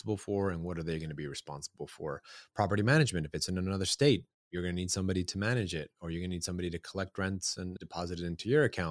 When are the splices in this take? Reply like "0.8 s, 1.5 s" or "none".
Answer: 7.7 s